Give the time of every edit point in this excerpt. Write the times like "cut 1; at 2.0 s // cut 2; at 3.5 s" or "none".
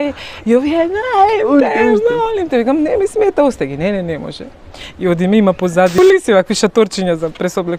cut 1; at 6.0 s